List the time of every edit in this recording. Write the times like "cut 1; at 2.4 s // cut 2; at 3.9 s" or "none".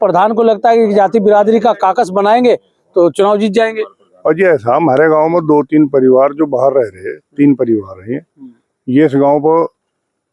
none

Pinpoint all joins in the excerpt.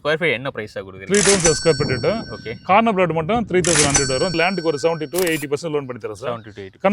cut 1; at 4.3 s

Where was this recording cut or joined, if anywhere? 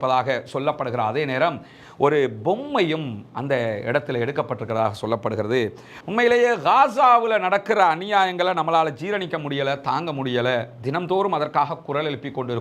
cut 1; at 6.0 s

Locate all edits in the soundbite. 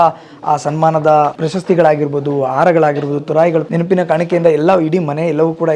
cut 1; at 1.4 s // cut 2; at 3.7 s

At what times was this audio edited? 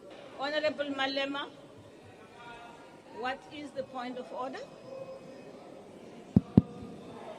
cut 1; at 6.3 s

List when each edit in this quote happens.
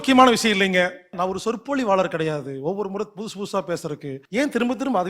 cut 1; at 1.2 s // cut 2; at 4.1 s

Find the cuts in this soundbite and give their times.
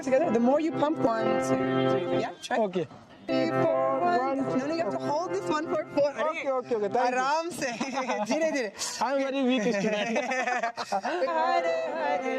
cut 1; at 1.1 s // cut 2; at 3.3 s // cut 3; at 11.3 s

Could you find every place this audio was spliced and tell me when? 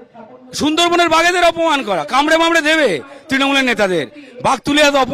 none

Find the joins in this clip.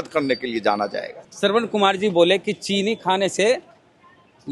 cut 1; at 1.2 s

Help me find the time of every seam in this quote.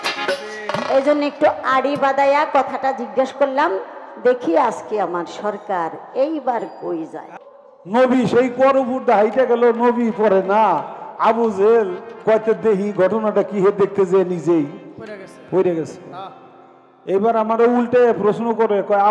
cut 1; at 7.3 s

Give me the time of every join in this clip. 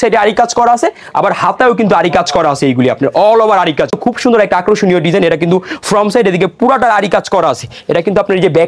cut 1; at 4.0 s

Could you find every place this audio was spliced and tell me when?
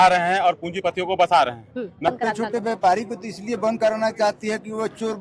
cut 1; at 2.1 s

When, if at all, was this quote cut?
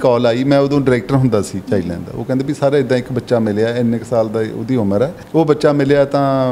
cut 1; at 5.2 s

